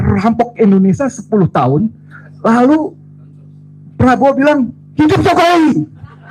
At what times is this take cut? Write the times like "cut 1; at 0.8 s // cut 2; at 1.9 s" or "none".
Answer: none